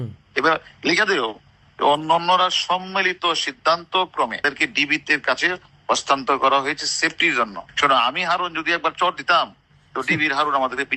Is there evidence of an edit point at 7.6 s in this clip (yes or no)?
yes